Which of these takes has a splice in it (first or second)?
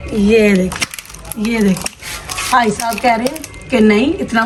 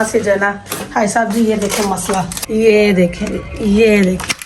second